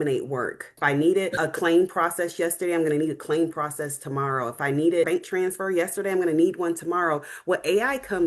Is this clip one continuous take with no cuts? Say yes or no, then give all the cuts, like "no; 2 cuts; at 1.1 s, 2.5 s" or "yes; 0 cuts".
no; 2 cuts; at 1.0 s, 5.1 s